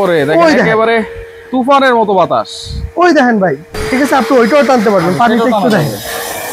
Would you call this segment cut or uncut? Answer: cut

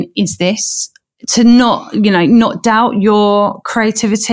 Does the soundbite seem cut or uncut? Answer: cut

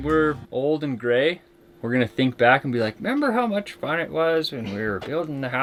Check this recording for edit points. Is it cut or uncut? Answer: uncut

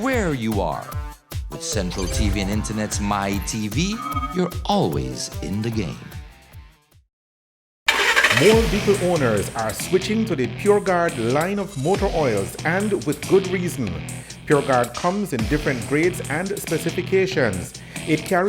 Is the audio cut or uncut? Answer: cut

